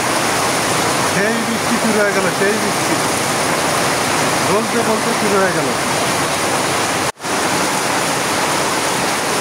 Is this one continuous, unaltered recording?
no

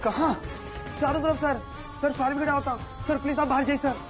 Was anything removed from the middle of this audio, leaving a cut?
no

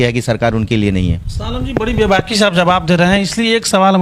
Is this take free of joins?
yes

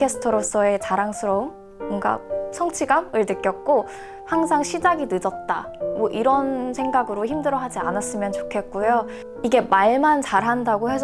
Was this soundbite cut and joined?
yes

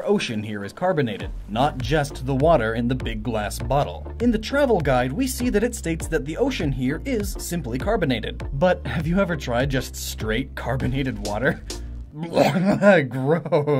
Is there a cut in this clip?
no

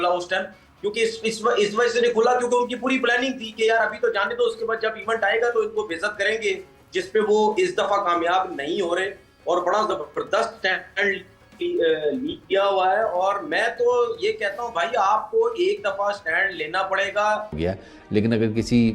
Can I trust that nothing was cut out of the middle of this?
no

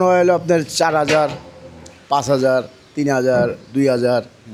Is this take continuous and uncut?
yes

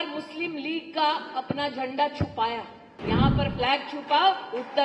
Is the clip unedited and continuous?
no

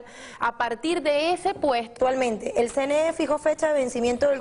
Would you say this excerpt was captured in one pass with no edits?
yes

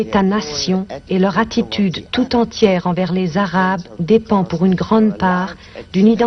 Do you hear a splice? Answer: yes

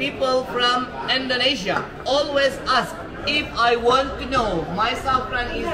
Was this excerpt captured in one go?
yes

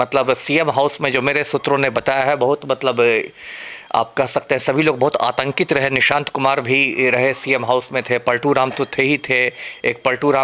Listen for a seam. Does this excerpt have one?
no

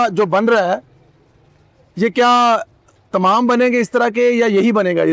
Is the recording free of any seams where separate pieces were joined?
yes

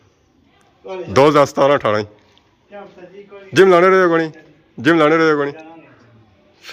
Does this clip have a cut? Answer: no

